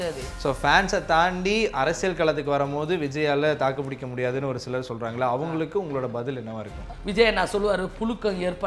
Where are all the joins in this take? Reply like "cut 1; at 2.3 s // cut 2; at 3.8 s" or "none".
cut 1; at 6.9 s